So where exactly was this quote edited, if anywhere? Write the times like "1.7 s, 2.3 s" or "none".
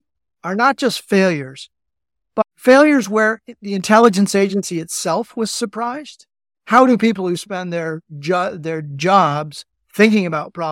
6.5 s